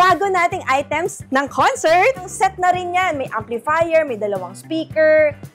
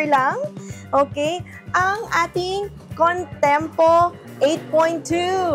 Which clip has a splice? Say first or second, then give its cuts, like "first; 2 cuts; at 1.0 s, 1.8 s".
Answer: first; 2 cuts; at 1.2 s, 2.3 s